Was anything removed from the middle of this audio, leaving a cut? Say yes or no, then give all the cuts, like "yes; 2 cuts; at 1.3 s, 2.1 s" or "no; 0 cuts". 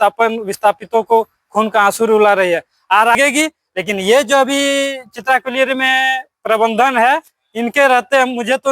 yes; 1 cut; at 3.2 s